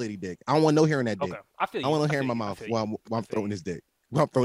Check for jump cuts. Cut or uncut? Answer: cut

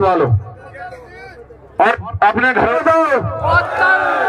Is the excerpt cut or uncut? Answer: cut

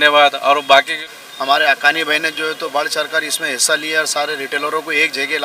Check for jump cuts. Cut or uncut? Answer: cut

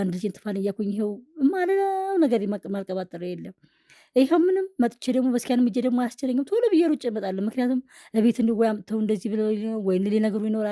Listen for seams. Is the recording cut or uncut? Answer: uncut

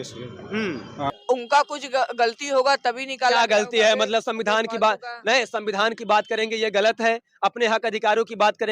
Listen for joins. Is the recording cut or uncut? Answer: cut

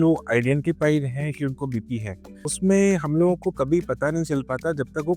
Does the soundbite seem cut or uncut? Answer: cut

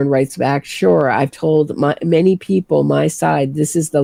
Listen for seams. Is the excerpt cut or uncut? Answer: uncut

